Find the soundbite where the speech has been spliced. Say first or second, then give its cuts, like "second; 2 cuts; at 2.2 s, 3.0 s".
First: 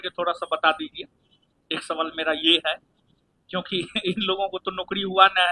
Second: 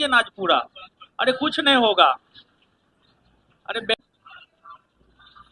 second; 1 cut; at 3.9 s